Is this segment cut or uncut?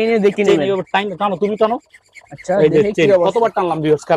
uncut